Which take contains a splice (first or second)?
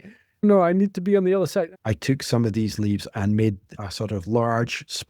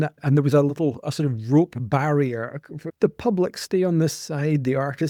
first